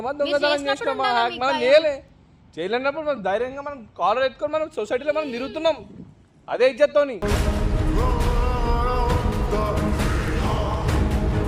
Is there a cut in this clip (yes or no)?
no